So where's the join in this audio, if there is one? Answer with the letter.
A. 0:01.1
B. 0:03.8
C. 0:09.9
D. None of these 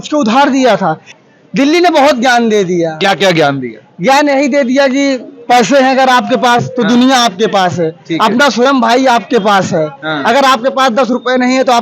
A